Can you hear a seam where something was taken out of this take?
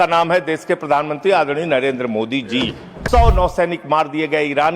yes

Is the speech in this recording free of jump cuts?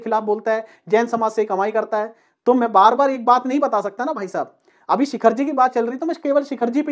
yes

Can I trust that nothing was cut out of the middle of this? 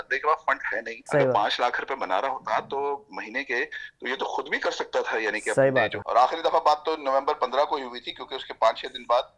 no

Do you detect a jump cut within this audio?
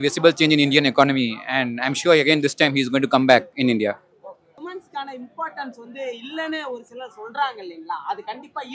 yes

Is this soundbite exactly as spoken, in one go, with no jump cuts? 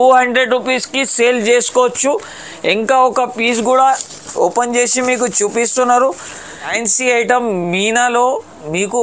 no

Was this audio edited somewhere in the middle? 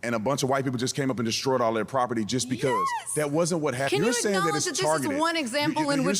yes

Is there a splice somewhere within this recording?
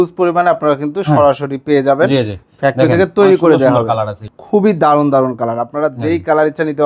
yes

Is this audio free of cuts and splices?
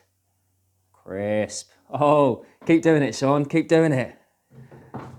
yes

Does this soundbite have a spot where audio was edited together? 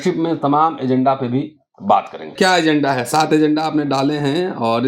yes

